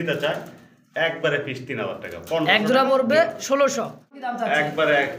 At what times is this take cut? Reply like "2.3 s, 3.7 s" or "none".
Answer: 4.3 s